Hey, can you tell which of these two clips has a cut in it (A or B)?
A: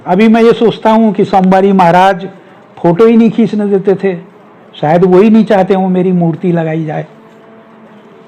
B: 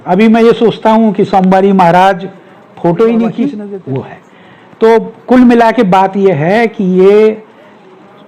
B